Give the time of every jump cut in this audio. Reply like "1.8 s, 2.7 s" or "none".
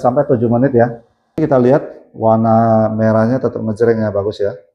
1.4 s